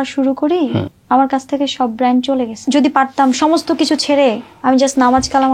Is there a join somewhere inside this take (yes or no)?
yes